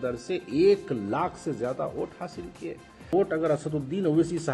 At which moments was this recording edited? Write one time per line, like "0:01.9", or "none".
0:03.1